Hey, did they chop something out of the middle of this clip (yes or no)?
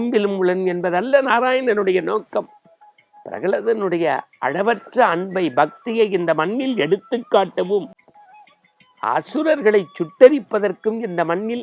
no